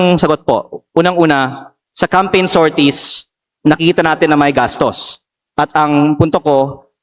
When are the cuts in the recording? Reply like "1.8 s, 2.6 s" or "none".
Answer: none